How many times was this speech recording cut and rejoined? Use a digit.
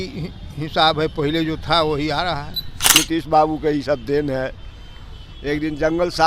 1